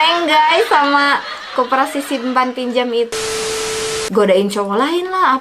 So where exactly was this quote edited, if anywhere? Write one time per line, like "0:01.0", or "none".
0:03.7